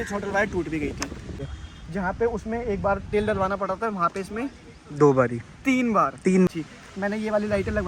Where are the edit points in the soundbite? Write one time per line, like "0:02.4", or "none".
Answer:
0:01.3
0:06.5